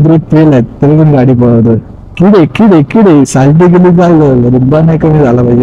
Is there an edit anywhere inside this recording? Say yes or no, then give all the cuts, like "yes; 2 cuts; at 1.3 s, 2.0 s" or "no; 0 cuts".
yes; 1 cut; at 2.0 s